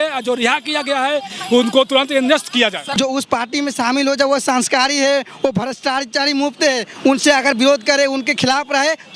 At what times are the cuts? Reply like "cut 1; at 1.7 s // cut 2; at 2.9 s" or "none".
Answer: cut 1; at 2.8 s